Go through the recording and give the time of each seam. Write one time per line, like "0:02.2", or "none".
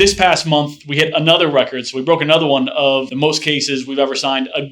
none